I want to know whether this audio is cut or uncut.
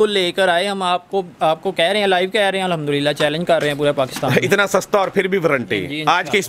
uncut